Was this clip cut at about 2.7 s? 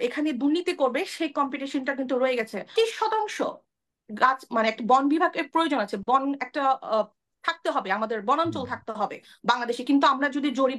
yes; 1 cut; at 2.7 s

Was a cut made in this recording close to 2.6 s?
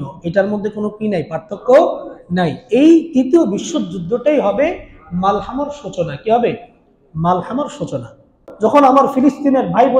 no; 1 cut; at 8.4 s

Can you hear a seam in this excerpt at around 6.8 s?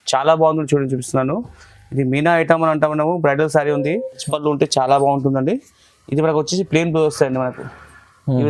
no; 1 cut; at 4.2 s

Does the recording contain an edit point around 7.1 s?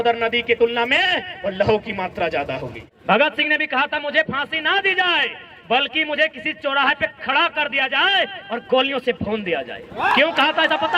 no; 1 cut; at 2.7 s

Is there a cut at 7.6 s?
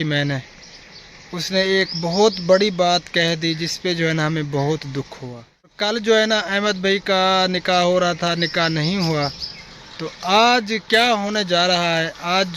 no; 1 cut; at 5.8 s

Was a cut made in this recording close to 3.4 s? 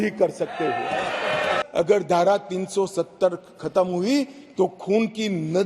no; 1 cut; at 1.7 s

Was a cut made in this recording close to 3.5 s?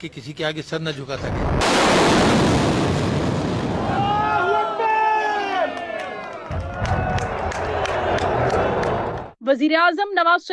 no; 1 cut; at 1.2 s

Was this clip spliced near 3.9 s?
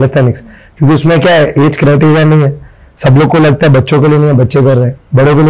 no; 0 cuts

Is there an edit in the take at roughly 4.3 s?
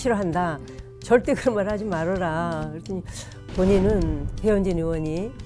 yes; 1 cut; at 4.3 s

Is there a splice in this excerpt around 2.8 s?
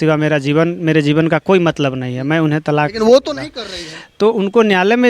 no; 0 cuts

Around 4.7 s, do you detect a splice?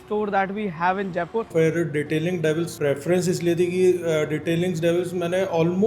no; 2 cuts; at 1.5 s, 2.7 s

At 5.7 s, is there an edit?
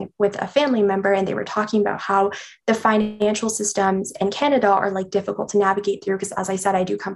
no; 0 cuts

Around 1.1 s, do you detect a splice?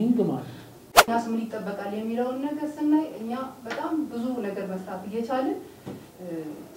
yes; 1 cut; at 1.1 s

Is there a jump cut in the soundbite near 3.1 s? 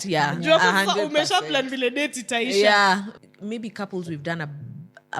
yes; 1 cut; at 3.1 s

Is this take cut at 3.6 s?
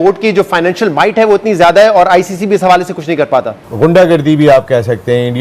yes; 1 cut; at 3.6 s

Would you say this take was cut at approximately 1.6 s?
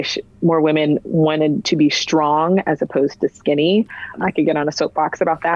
no; 1 cut; at 4.2 s

